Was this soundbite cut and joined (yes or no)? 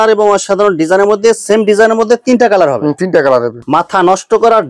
yes